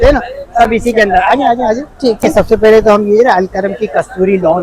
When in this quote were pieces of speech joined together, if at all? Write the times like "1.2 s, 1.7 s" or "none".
2.2 s